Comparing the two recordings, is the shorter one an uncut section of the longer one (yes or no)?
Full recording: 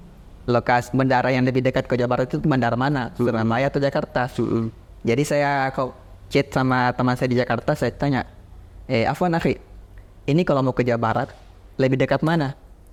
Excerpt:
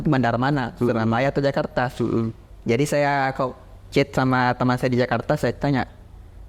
yes